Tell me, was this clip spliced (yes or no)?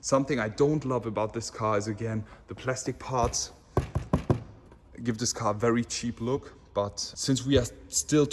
no